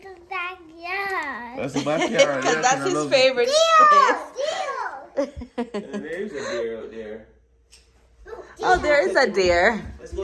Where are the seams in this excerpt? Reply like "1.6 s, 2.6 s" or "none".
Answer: none